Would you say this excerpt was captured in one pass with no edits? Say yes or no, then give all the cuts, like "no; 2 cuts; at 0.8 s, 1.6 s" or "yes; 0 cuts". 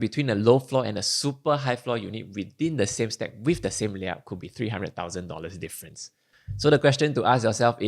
yes; 0 cuts